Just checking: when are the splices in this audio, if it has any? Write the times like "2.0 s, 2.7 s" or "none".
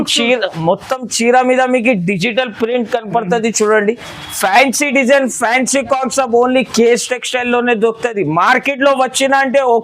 none